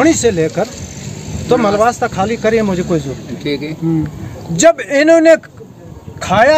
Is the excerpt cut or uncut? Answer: uncut